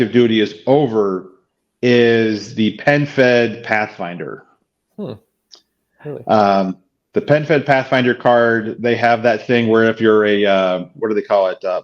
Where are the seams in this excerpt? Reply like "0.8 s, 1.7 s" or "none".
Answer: none